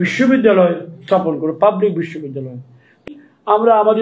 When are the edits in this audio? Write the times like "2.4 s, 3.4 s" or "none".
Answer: 3.0 s